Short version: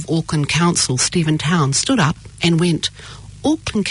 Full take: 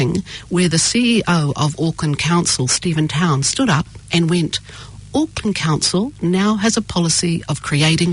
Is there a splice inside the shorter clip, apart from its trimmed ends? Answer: no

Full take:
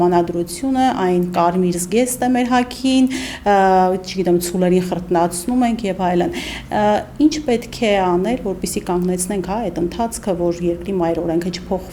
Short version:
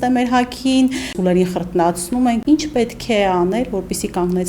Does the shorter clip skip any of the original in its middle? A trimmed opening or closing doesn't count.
yes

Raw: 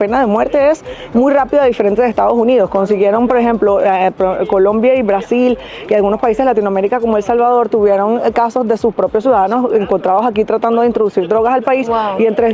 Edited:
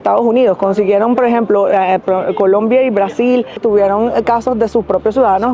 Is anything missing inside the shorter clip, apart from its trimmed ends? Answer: yes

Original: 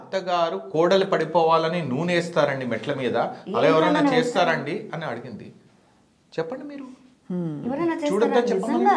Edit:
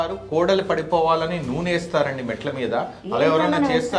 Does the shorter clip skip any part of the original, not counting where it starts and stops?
no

